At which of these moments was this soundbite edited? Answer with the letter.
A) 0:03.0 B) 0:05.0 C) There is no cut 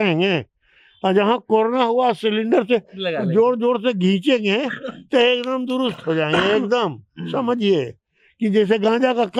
C